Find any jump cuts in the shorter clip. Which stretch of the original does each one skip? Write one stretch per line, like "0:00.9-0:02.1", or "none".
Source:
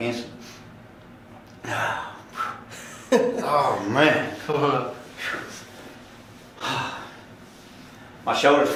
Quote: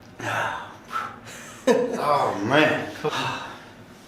0:04.5-0:06.6